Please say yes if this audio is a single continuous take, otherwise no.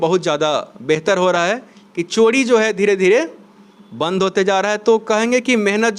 yes